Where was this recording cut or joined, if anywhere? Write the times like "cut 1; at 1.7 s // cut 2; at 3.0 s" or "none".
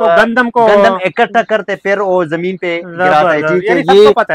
none